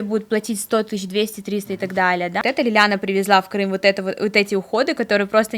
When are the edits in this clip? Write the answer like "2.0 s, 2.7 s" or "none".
2.4 s